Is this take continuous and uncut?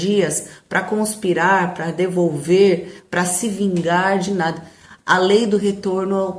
yes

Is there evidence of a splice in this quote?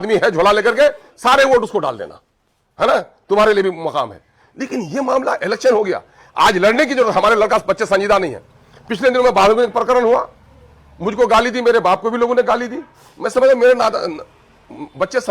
no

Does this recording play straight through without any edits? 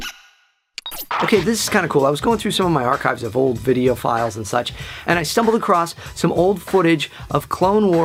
yes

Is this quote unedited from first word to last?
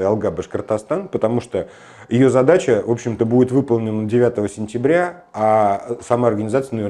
yes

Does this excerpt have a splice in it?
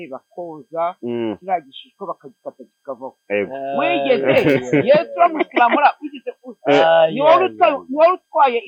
no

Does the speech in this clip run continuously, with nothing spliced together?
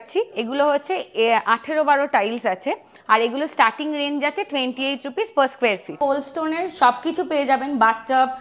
no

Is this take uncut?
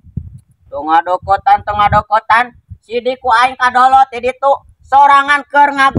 yes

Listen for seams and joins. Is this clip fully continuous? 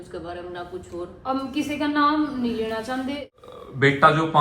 no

